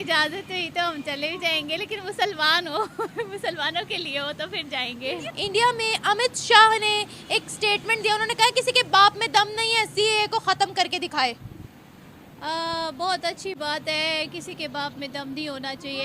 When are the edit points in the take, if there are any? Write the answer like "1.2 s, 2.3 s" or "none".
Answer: 5.2 s